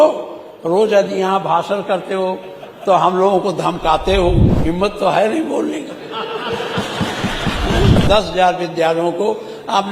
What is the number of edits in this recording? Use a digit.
2